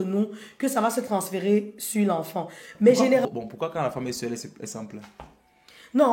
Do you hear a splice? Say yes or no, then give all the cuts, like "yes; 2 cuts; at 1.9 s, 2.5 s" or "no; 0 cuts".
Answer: yes; 1 cut; at 3.2 s